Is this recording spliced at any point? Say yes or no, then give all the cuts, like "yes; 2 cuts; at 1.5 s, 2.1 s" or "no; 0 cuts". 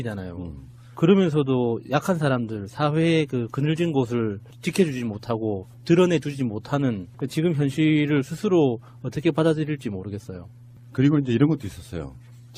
no; 0 cuts